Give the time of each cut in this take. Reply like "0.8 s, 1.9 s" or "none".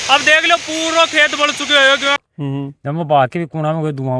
none